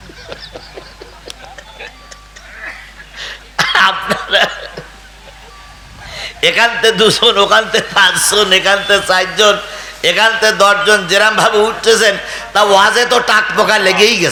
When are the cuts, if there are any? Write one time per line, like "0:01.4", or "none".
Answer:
none